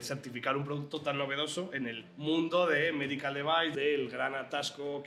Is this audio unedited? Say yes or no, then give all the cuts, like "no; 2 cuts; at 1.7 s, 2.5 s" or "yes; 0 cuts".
no; 2 cuts; at 2.1 s, 3.7 s